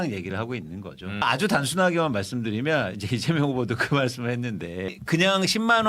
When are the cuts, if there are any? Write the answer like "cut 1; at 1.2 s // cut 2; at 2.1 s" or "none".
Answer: cut 1; at 1.2 s // cut 2; at 5.0 s